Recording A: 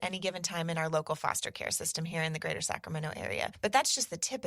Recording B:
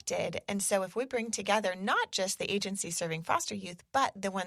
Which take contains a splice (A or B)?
A